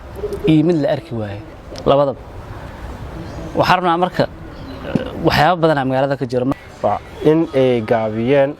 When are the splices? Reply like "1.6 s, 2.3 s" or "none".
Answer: 6.5 s